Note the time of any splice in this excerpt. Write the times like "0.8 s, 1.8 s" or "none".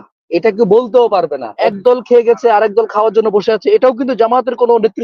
1.5 s